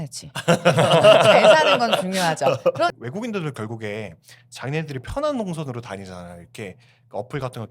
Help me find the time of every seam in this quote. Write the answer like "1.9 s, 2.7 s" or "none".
2.9 s